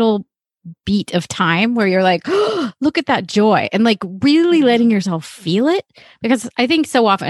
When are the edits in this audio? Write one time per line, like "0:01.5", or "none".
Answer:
none